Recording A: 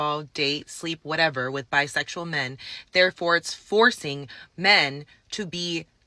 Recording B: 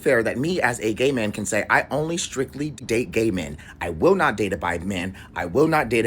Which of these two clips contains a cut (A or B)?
B